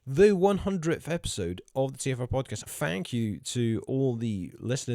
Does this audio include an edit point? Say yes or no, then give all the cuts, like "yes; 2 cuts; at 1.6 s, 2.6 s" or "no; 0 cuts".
yes; 1 cut; at 2.6 s